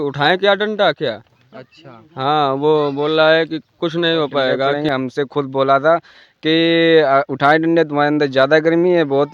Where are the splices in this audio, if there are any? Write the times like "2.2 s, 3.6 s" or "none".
4.8 s